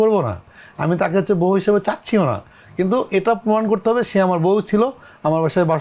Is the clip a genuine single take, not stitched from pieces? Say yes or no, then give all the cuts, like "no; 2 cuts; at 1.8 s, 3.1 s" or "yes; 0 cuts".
yes; 0 cuts